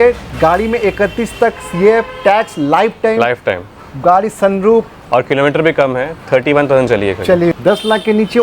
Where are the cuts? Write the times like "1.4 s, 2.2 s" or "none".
7.5 s